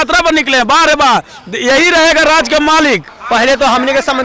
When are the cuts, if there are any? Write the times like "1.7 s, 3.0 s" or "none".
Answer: 3.1 s